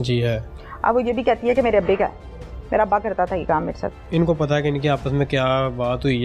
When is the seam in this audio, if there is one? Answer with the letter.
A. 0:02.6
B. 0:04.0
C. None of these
B